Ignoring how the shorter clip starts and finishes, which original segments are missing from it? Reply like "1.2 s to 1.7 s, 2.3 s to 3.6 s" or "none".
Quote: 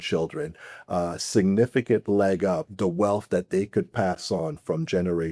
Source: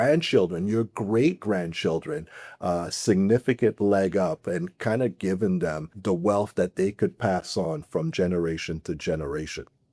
4.4 s to 5.9 s